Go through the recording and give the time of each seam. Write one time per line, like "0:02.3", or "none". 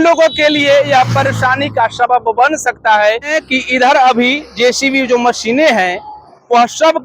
0:03.4